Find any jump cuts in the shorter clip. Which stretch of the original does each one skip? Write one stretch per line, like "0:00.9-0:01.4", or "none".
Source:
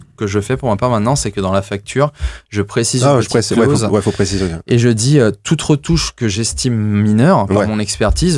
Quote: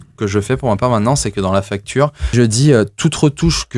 0:02.3-0:04.8